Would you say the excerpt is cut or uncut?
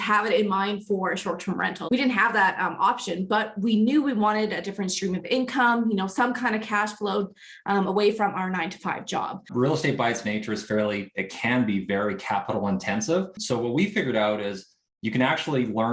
cut